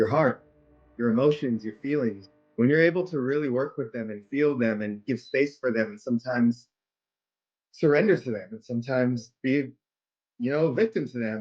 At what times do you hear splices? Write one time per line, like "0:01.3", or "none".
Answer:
0:02.2

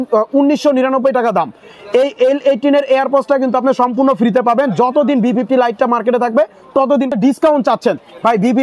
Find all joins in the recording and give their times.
0:07.1

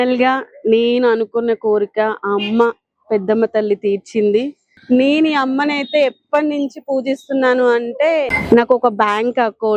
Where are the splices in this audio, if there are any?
0:04.6

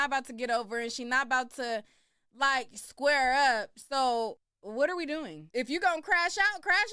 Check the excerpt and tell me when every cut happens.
0:04.5
0:05.4

